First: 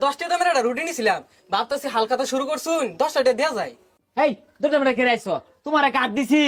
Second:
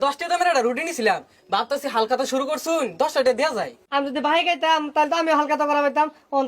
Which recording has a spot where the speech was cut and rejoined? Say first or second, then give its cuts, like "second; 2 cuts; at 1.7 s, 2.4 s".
second; 1 cut; at 3.8 s